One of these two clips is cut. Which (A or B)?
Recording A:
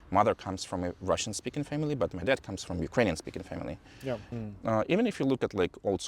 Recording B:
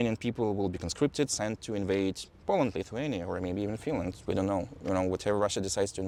A